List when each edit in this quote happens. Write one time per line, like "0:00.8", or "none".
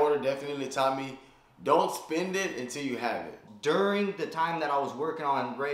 0:03.5